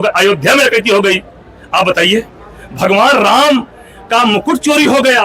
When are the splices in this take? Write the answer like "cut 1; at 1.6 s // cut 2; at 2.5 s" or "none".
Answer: none